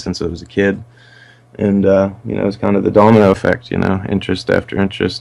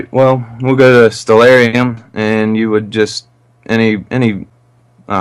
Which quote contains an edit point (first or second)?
second